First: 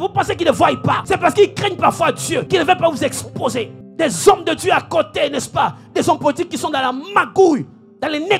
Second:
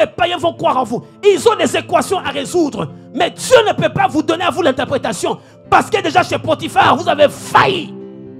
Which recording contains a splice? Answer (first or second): first